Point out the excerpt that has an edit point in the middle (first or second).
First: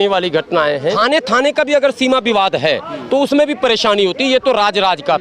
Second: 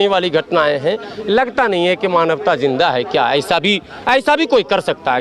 first